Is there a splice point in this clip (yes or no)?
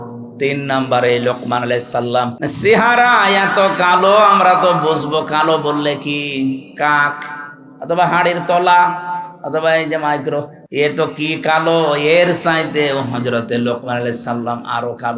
yes